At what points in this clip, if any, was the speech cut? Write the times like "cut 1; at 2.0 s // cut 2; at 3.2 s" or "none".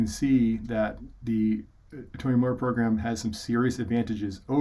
none